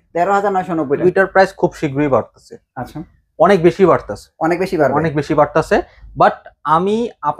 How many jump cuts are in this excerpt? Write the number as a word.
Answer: one